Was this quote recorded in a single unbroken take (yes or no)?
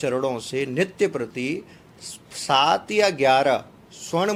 yes